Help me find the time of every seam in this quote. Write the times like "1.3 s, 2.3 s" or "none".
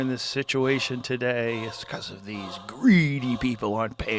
none